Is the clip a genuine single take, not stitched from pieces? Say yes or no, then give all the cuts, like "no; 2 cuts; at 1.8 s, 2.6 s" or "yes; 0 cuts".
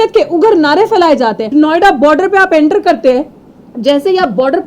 no; 1 cut; at 1.4 s